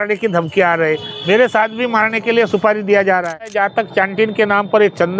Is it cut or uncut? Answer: cut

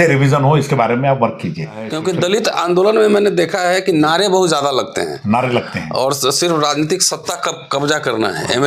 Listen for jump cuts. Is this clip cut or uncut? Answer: cut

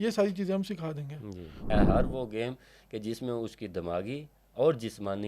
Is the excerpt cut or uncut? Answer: cut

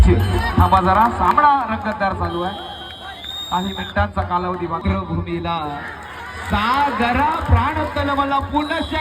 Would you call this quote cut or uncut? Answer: cut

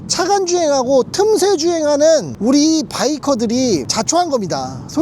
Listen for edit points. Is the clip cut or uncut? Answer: cut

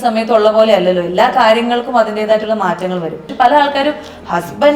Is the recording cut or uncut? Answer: cut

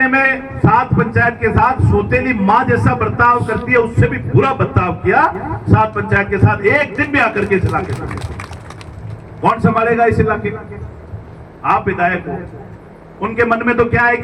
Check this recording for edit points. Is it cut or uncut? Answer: uncut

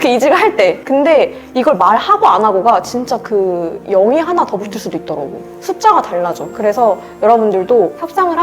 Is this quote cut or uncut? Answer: uncut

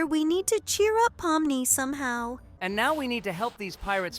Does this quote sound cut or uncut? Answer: cut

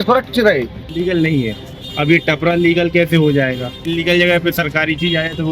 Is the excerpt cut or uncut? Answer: cut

